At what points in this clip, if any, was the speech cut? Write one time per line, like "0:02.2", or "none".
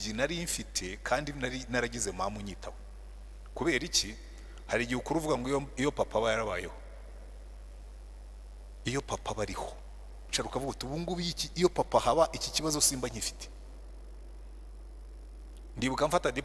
0:10.3